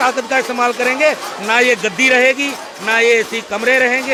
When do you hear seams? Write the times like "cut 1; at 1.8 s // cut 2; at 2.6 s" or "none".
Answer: none